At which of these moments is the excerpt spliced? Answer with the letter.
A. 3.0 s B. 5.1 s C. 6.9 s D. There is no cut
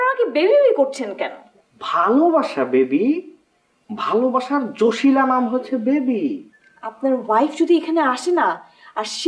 D